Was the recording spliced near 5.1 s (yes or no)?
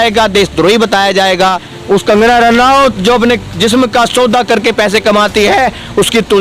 no